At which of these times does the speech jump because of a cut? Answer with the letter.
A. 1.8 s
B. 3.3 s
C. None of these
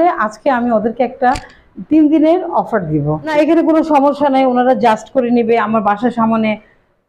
B